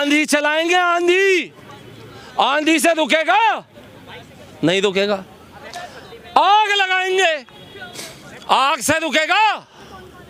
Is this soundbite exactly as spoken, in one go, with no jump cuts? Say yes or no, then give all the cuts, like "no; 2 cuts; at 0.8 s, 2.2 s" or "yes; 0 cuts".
yes; 0 cuts